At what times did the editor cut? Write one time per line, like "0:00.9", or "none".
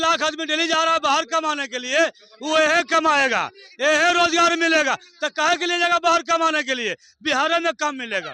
none